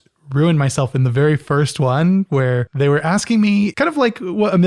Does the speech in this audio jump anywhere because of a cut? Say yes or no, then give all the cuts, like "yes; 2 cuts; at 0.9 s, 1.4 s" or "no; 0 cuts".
yes; 2 cuts; at 2.3 s, 3.7 s